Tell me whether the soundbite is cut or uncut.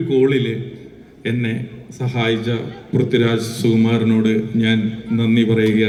uncut